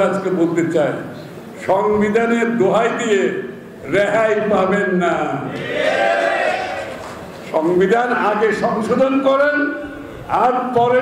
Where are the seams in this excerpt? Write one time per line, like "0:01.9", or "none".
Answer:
none